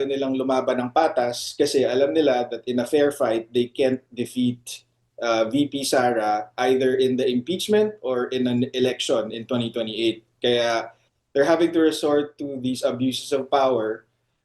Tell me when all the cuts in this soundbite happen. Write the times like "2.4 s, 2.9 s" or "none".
10.5 s